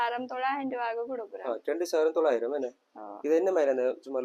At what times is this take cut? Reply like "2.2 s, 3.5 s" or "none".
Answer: none